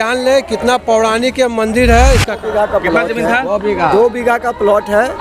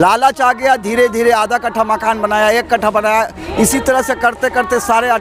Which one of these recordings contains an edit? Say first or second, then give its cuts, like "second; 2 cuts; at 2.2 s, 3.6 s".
first; 1 cut; at 2.3 s